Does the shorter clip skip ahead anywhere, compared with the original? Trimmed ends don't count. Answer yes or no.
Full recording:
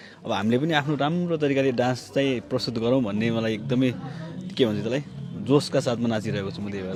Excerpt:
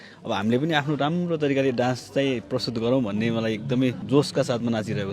yes